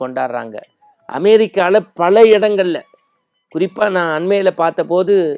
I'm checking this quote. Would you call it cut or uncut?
uncut